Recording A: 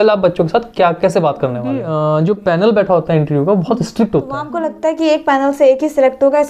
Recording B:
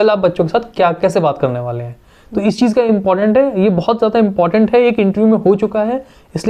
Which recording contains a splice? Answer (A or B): A